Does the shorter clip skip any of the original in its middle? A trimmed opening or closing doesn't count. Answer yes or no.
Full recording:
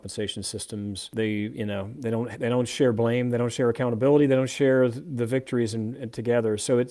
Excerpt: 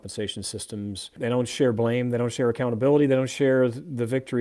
yes